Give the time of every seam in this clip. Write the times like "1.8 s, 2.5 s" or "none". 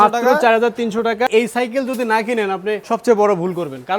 1.3 s, 2.8 s